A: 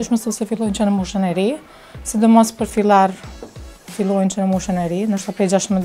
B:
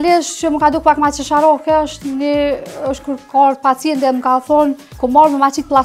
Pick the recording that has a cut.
B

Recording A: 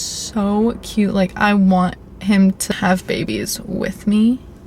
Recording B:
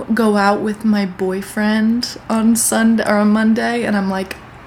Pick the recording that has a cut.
A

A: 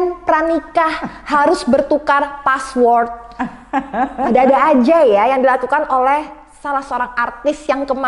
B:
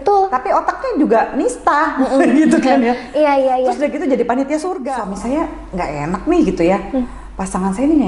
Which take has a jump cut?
B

